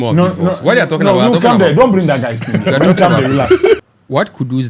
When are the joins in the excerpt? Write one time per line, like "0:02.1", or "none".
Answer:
0:03.8